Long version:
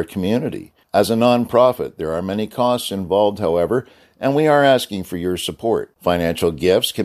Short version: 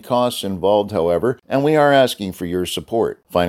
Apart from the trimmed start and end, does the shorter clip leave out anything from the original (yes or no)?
yes